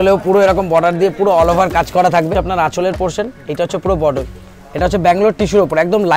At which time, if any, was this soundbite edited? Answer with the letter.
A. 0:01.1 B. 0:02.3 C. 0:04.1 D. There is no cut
B